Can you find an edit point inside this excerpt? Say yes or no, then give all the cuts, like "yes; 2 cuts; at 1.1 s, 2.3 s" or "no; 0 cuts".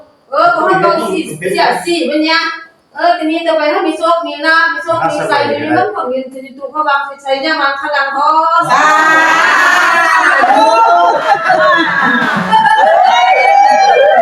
no; 0 cuts